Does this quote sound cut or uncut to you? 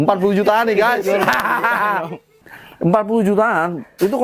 cut